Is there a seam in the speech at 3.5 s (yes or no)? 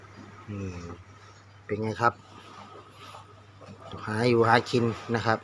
no